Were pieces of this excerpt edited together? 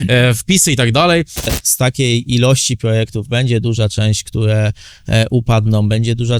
yes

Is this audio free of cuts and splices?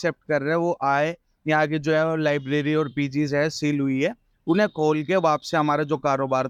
yes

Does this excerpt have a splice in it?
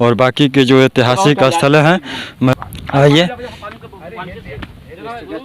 no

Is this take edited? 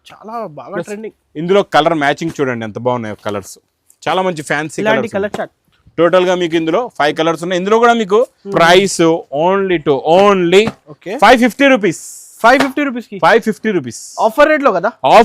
yes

